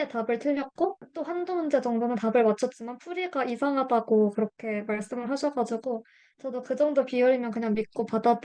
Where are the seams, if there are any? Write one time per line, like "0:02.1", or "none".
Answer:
none